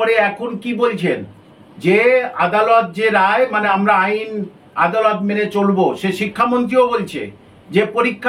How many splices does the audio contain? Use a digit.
0